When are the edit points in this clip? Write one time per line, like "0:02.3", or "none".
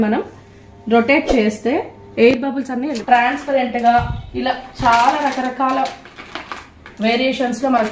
0:03.0